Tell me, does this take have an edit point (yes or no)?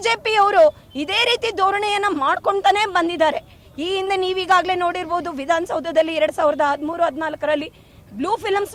no